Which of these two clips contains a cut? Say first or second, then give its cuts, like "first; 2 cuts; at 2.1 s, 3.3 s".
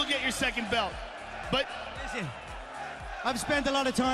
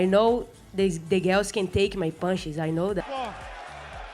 second; 1 cut; at 3.0 s